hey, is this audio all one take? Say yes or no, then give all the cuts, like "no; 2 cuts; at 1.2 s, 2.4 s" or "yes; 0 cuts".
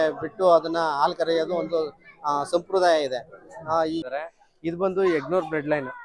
no; 1 cut; at 4.0 s